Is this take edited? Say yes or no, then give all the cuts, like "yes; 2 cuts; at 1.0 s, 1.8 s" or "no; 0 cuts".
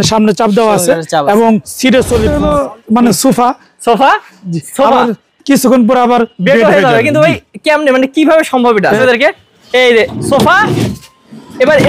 yes; 2 cuts; at 2.4 s, 9.0 s